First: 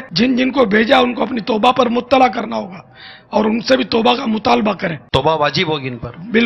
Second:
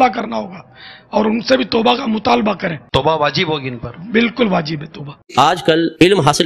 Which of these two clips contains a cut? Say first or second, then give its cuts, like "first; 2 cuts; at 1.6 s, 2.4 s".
second; 1 cut; at 5.2 s